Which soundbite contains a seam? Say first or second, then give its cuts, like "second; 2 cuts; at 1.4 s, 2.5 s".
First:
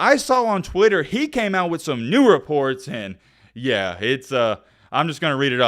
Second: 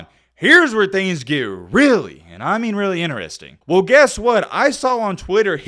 second; 1 cut; at 3.5 s